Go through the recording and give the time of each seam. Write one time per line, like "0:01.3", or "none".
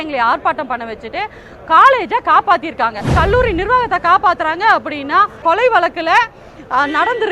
0:03.1
0:05.4